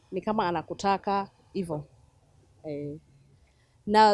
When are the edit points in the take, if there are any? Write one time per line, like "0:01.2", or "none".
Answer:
none